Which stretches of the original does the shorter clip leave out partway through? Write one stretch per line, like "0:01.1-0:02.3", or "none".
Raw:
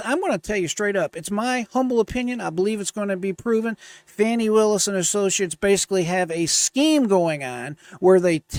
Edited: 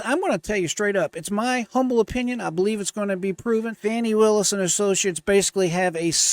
0:03.7-0:04.1